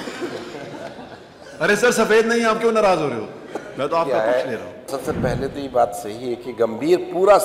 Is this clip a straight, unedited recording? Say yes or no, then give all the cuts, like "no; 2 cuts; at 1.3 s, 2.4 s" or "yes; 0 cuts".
no; 1 cut; at 4.9 s